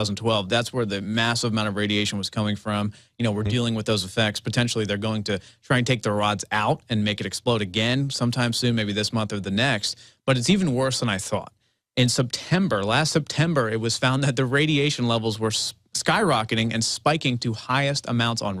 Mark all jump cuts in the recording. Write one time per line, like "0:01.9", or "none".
none